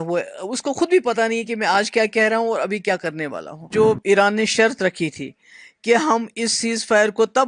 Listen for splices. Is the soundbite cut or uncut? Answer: cut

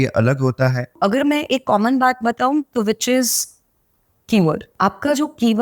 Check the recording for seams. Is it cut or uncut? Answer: cut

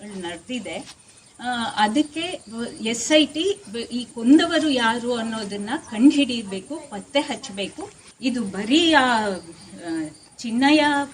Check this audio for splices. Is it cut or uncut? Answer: cut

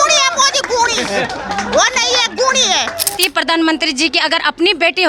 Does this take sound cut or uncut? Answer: cut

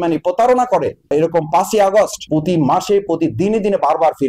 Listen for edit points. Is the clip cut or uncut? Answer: uncut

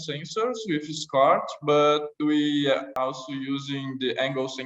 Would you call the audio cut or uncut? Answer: cut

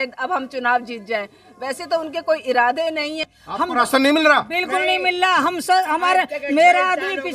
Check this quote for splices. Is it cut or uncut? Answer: cut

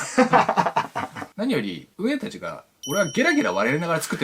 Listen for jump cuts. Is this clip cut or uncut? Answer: cut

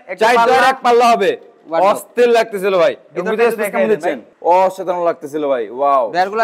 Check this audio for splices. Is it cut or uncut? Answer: uncut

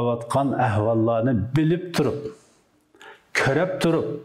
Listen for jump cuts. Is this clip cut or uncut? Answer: uncut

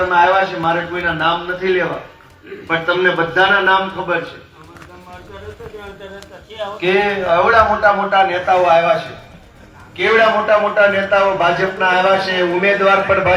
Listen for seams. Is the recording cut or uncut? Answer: uncut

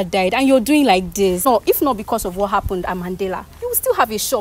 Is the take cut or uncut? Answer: cut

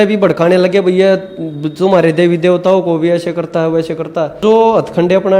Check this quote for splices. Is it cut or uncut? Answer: cut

